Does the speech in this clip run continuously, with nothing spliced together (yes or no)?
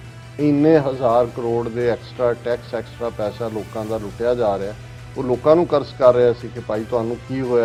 yes